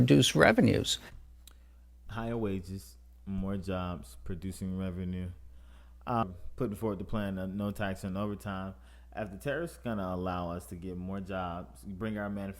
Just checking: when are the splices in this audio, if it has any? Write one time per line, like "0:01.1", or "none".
0:06.2